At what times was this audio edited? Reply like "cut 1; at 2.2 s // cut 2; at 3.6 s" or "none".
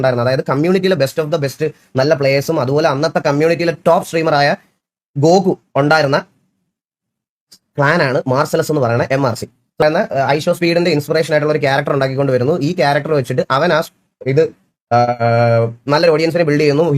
cut 1; at 9.8 s